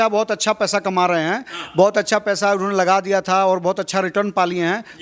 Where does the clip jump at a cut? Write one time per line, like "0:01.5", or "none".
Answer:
none